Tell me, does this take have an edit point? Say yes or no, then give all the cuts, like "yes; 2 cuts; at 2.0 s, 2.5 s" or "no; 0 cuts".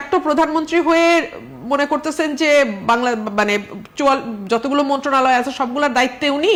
no; 0 cuts